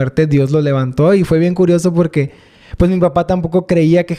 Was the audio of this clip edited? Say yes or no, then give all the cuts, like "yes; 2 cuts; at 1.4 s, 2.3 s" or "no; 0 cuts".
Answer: no; 0 cuts